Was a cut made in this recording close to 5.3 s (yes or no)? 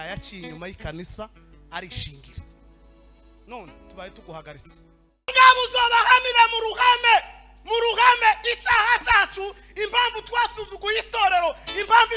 yes